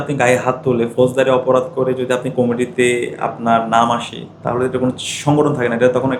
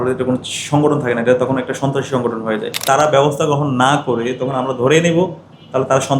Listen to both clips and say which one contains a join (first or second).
second